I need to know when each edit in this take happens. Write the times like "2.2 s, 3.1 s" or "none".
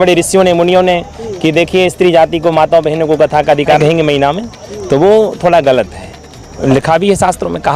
3.8 s, 6.5 s